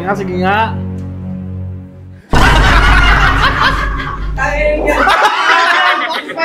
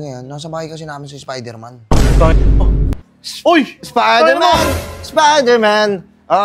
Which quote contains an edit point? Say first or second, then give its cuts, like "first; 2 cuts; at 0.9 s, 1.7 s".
second; 1 cut; at 3.0 s